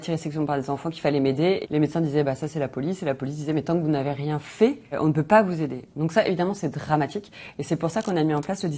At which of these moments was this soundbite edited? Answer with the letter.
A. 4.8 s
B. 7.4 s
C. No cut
C